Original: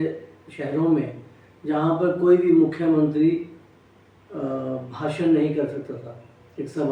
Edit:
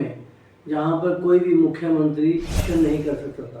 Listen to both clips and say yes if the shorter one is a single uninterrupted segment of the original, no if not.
no